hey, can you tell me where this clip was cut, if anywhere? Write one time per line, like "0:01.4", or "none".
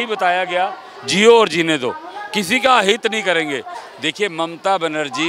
0:03.7